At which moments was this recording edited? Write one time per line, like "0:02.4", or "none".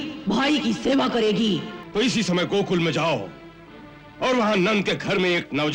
0:01.8